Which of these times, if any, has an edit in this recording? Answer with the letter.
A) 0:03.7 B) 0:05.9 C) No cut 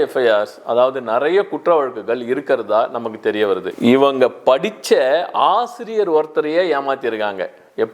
A